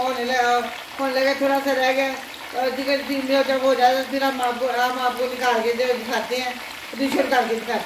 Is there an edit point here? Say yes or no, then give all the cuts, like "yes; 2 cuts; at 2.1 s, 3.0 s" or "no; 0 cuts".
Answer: no; 0 cuts